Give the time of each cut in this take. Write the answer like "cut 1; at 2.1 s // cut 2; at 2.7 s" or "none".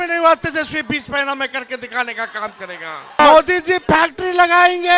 cut 1; at 3.2 s